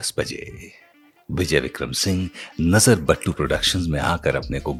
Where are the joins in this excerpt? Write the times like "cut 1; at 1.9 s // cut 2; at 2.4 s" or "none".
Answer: none